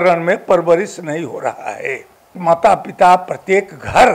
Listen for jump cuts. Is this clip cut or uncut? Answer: cut